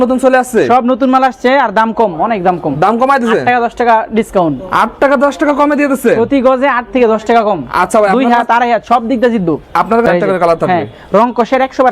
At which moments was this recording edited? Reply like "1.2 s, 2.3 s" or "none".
10.1 s

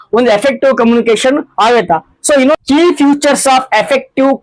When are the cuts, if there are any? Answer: 2.5 s

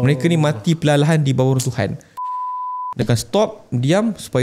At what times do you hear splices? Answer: 2.5 s

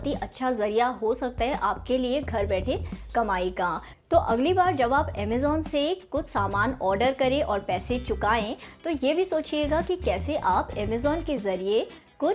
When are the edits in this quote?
none

